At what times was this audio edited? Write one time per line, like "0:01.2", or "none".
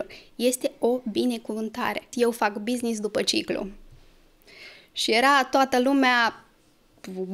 0:02.1